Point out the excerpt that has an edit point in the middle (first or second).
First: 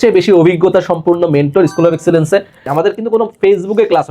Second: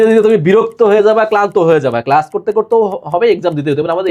first